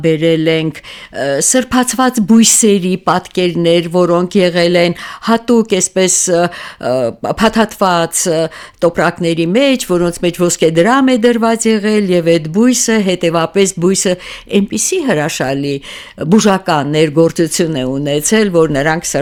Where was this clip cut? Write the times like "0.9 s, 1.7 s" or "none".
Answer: none